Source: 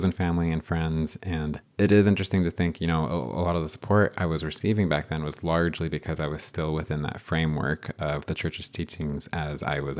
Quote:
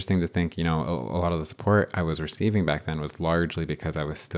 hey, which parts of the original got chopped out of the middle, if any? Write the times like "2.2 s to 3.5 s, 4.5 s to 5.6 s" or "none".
none